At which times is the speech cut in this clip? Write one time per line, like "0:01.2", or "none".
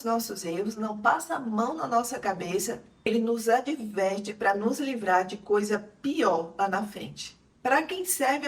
0:07.4